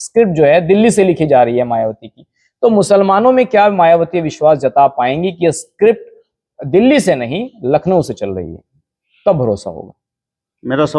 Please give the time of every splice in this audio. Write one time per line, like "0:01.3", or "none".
none